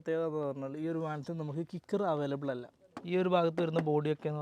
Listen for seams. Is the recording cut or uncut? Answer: cut